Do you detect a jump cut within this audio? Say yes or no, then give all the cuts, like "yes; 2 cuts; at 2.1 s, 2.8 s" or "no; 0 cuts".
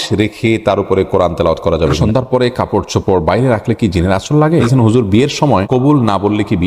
yes; 3 cuts; at 2.0 s, 4.7 s, 5.7 s